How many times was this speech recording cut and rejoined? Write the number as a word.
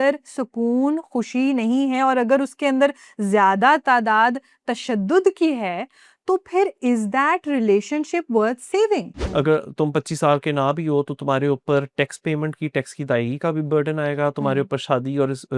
one